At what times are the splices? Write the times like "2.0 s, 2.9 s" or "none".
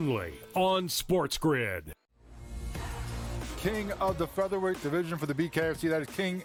none